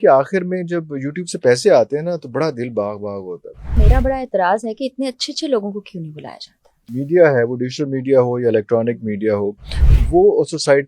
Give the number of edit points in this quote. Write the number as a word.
two